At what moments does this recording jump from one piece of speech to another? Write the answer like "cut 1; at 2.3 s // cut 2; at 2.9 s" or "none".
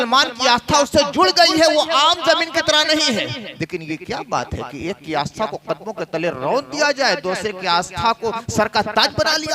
cut 1; at 3.5 s